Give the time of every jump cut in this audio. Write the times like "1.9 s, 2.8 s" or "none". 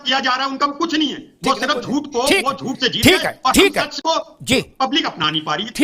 none